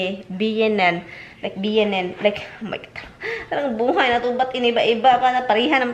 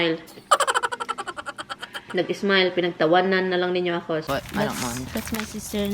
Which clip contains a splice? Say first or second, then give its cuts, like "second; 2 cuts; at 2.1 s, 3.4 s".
second; 1 cut; at 4.2 s